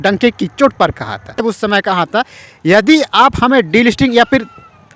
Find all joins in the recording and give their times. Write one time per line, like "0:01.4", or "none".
0:01.4